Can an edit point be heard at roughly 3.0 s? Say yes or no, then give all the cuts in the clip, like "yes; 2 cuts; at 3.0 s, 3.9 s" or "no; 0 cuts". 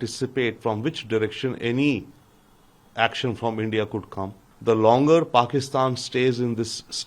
no; 1 cut; at 4.4 s